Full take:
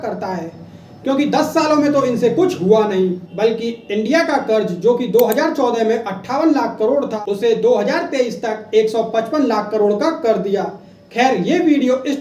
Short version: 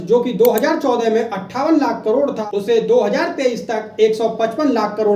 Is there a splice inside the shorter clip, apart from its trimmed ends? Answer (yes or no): no